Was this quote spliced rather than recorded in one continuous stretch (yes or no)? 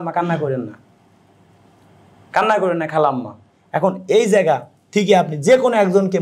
no